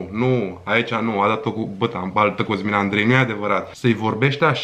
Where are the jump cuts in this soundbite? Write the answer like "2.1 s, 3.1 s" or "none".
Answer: 3.7 s